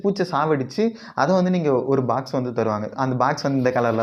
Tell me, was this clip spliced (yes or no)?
no